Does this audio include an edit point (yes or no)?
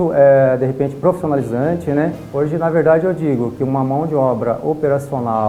yes